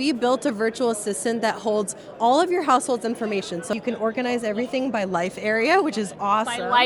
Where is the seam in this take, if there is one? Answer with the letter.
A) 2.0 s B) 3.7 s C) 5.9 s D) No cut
B